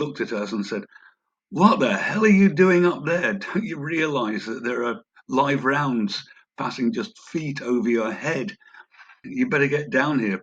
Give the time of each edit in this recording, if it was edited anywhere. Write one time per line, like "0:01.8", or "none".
0:09.3